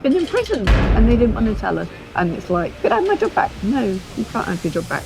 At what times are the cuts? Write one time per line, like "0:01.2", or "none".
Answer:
0:02.0
0:02.8